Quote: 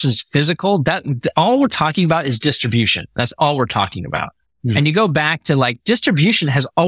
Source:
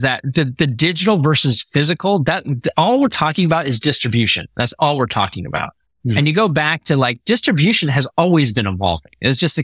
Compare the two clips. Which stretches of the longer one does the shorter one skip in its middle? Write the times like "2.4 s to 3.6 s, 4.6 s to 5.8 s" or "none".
none